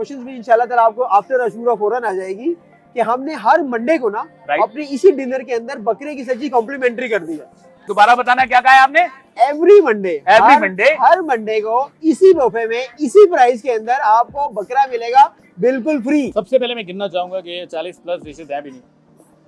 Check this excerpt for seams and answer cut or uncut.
cut